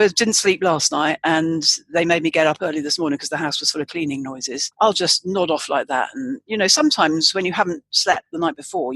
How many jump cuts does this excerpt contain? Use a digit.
1